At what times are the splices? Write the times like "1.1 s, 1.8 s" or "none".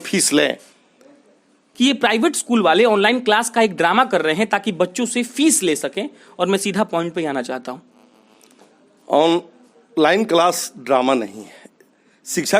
1.6 s